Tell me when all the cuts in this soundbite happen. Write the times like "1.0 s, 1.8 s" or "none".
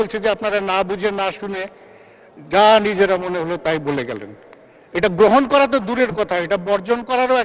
none